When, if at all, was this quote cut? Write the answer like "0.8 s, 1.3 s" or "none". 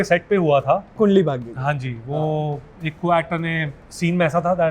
0.9 s, 3.8 s